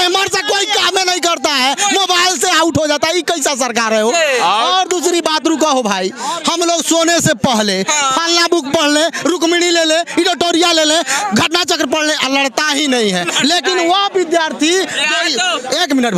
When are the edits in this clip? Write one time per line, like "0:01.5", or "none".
none